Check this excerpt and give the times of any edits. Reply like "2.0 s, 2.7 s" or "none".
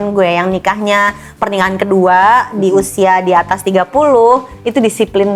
none